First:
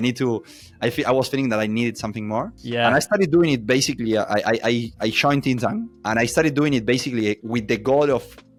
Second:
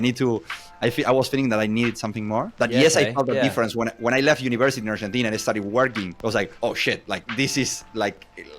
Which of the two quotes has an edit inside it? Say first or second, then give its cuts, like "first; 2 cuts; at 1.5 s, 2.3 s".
second; 1 cut; at 2.5 s